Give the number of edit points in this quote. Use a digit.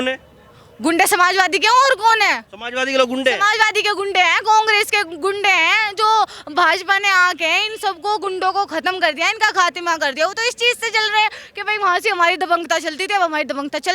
0